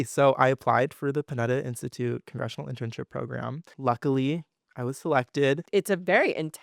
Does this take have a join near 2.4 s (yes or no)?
no